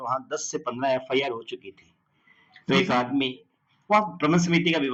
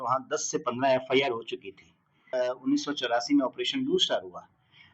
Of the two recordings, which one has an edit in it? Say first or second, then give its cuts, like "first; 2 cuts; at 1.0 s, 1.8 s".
second; 1 cut; at 2.1 s